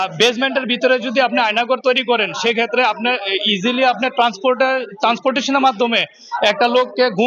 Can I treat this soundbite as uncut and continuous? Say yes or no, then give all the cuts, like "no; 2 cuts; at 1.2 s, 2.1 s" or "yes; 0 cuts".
yes; 0 cuts